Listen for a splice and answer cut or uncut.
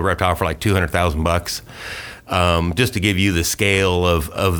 uncut